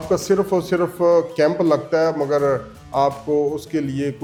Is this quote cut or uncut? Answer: uncut